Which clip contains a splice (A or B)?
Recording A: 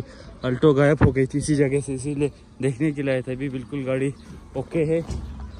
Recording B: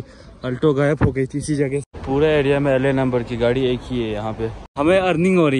B